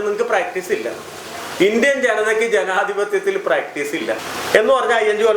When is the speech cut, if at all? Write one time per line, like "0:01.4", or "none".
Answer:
0:04.3